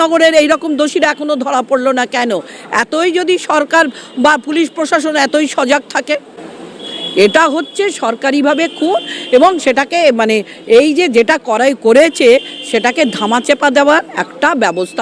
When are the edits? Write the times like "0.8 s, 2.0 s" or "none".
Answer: none